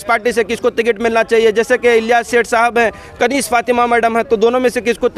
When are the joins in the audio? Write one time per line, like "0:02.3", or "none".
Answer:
0:01.7